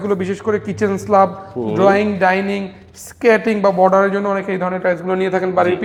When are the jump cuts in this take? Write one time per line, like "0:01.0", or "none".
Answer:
none